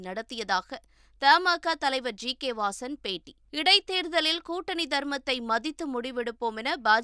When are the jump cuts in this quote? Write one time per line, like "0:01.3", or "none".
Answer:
none